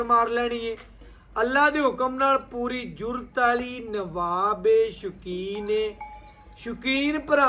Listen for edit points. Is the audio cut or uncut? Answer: uncut